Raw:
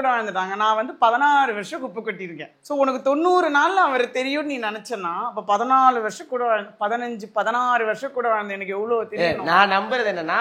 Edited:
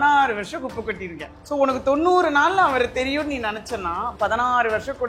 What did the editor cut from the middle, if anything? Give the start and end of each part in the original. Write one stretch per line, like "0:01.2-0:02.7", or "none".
0:05.3-0:07.3